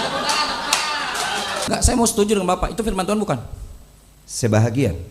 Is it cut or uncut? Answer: cut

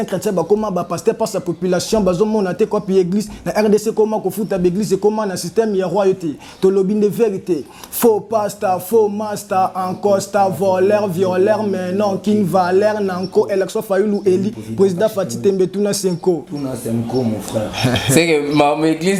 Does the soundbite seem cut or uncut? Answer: uncut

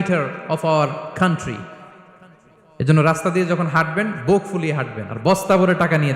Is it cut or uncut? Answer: uncut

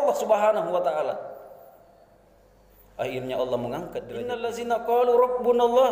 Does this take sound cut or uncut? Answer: cut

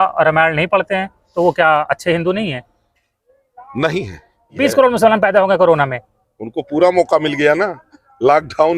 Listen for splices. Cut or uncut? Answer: cut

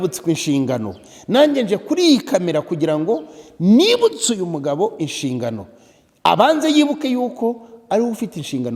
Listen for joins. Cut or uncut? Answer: uncut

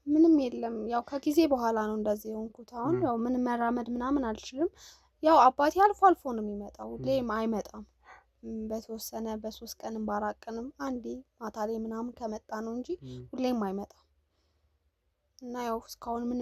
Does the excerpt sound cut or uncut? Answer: uncut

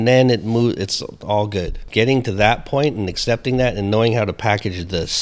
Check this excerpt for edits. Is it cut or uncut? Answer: cut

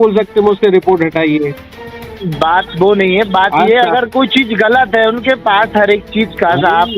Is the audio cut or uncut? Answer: uncut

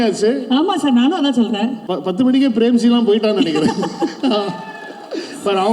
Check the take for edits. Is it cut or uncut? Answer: cut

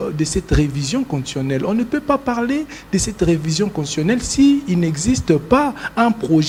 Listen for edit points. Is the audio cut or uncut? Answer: uncut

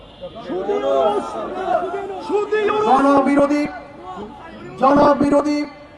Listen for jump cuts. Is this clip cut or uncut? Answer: uncut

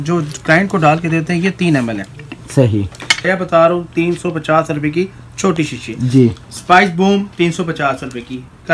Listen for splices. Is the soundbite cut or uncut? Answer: cut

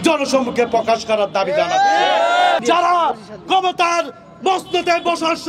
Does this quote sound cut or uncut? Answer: cut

